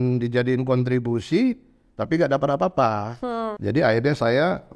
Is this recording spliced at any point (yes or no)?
yes